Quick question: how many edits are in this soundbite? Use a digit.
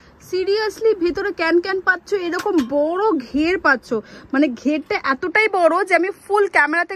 0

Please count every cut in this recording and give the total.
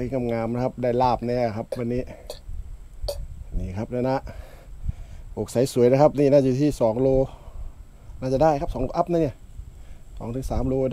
0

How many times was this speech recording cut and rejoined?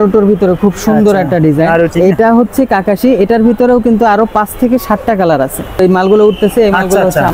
2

